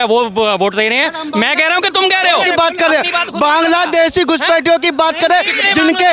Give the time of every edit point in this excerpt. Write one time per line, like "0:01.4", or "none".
none